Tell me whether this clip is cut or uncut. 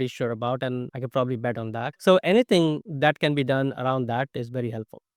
cut